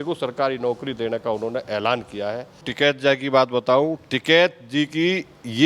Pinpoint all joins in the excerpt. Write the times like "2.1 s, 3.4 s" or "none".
2.7 s

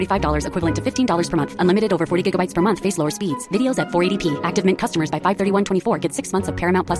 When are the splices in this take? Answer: none

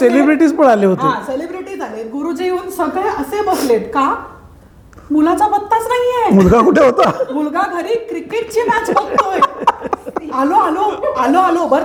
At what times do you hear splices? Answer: none

